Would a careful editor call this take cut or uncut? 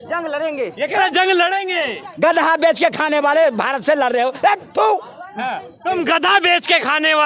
uncut